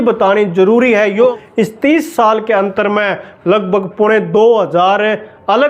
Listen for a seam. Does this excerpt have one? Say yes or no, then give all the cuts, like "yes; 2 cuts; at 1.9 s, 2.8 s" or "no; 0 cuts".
yes; 1 cut; at 1.4 s